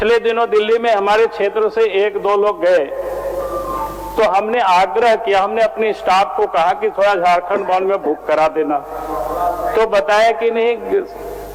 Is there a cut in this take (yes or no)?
no